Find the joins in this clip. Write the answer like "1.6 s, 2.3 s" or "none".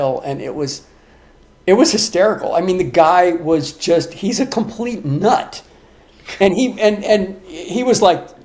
none